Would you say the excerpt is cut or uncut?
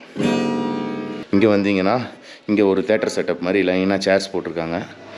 cut